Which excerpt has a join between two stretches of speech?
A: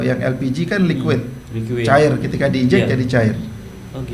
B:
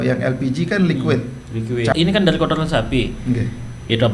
B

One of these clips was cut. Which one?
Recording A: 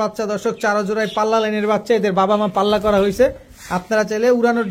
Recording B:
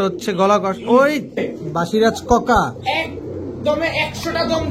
B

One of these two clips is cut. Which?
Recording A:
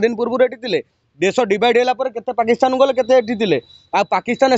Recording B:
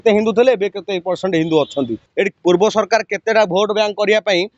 B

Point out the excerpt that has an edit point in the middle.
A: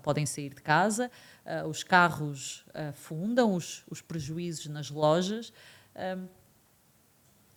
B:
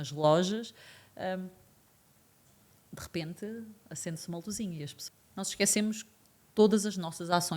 B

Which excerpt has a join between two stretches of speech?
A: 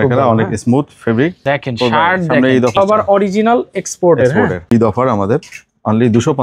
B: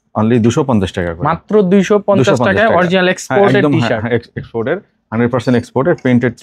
A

